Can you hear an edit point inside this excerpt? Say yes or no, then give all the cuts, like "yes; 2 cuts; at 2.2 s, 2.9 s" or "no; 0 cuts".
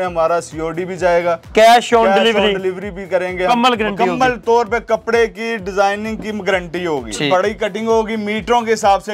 yes; 2 cuts; at 3.5 s, 7.3 s